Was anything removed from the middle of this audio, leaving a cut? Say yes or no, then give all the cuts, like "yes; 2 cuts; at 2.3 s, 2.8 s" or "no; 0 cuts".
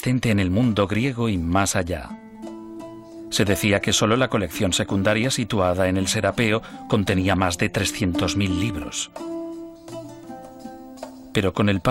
yes; 1 cut; at 7.2 s